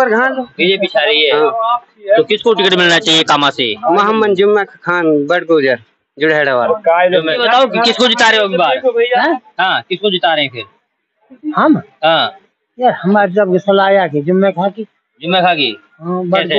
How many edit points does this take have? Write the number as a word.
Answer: one